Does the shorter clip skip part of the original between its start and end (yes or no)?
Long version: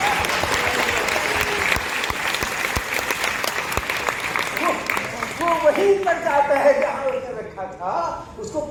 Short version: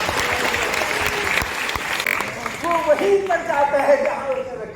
yes